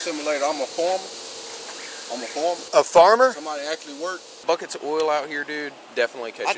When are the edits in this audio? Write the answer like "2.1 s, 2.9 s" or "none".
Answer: 2.6 s, 4.4 s